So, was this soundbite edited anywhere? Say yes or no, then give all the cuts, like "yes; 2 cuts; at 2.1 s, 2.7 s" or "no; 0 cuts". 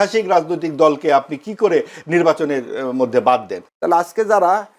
yes; 1 cut; at 3.6 s